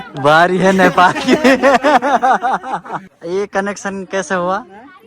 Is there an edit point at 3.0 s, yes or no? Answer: yes